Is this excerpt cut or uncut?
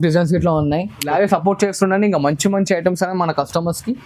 cut